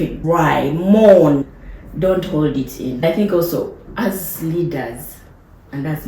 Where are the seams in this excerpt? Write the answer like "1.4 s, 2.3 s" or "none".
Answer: 3.0 s